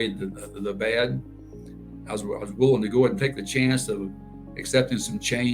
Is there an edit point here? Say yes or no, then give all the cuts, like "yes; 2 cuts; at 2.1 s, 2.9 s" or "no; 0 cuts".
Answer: no; 0 cuts